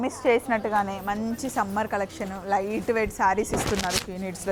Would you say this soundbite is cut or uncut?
uncut